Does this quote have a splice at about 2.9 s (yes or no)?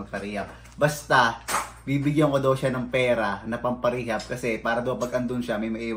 no